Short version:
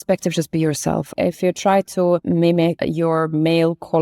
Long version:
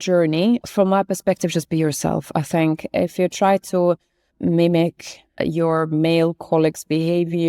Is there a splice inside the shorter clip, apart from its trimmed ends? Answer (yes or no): yes